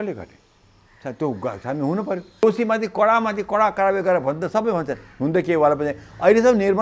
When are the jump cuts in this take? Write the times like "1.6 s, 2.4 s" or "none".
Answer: 2.4 s